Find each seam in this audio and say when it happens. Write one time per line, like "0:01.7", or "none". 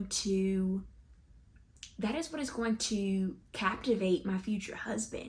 none